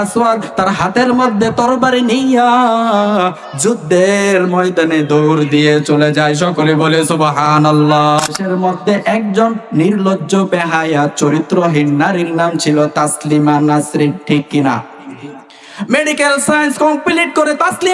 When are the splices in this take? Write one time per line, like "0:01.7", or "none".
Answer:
0:08.4